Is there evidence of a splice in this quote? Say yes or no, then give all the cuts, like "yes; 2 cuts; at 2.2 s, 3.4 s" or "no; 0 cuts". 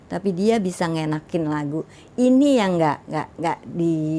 no; 0 cuts